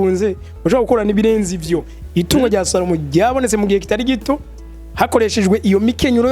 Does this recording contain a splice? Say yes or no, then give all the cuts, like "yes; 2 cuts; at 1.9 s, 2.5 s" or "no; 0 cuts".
yes; 1 cut; at 2.0 s